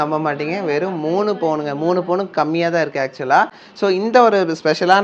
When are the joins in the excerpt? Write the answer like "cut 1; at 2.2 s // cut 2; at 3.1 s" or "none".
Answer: none